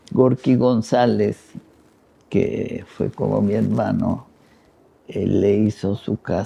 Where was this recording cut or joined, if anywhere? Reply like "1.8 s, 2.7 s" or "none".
none

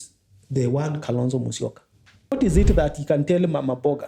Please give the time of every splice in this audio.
2.3 s

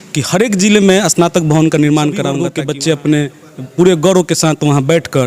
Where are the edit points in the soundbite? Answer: 2.4 s

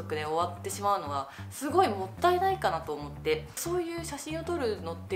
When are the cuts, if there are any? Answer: 3.6 s

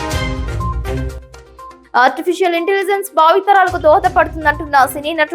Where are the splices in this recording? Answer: 1.8 s

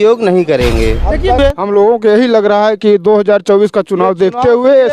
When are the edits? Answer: 1.4 s

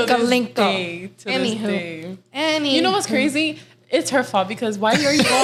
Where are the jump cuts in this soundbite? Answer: none

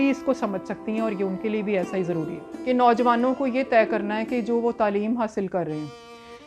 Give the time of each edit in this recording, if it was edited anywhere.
2.5 s

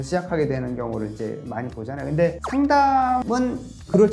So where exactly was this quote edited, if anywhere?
2.4 s, 3.2 s

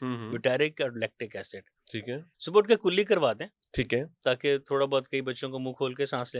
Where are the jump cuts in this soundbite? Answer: 2.3 s

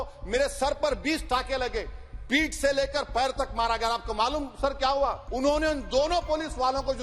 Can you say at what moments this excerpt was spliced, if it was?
5.2 s

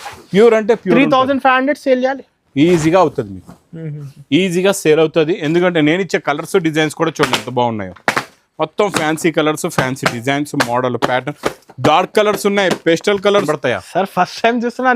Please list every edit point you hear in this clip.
13.5 s

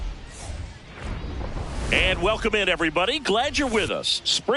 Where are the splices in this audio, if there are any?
1.9 s

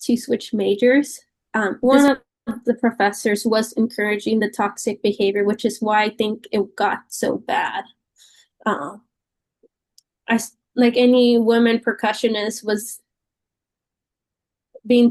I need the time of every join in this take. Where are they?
1.7 s

